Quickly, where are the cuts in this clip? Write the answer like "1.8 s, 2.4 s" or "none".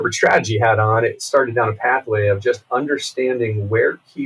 1.2 s